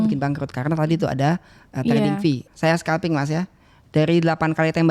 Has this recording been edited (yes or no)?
yes